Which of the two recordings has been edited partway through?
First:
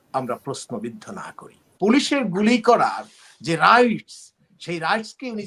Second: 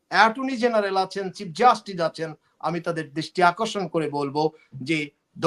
first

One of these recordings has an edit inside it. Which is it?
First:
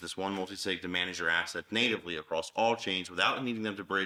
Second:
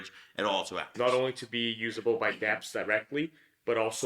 second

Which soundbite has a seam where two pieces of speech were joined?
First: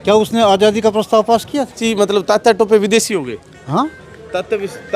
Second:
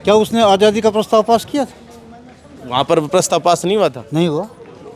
first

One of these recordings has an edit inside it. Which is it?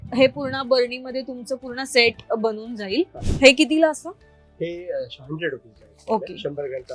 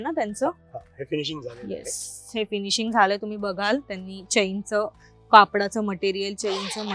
first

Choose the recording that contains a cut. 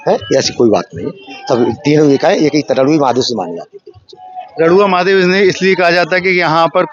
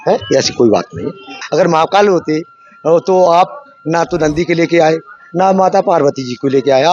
second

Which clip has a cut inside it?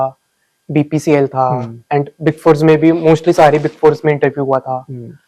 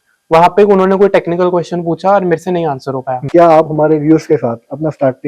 second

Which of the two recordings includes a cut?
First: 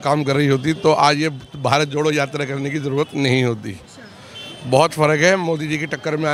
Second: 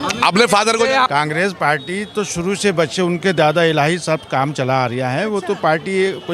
second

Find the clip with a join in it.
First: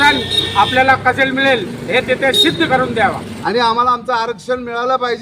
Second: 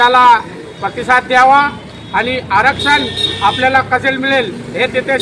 first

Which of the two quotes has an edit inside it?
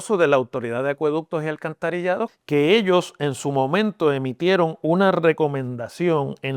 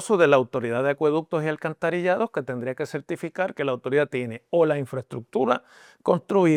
first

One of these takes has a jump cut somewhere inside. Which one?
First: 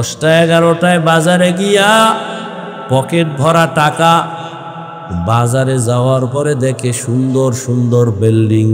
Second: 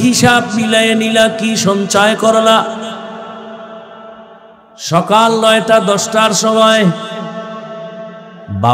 second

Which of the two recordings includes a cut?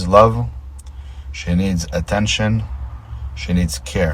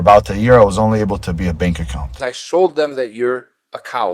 second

